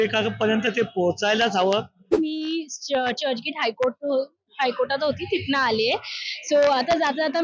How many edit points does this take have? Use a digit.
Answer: 1